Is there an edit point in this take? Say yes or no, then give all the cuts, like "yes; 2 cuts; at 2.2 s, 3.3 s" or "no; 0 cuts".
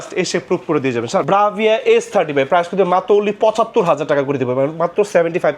yes; 1 cut; at 1.2 s